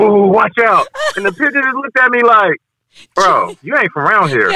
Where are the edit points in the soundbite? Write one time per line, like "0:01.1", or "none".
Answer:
none